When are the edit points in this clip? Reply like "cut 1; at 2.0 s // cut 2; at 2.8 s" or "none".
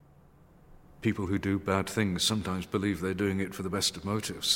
cut 1; at 1.0 s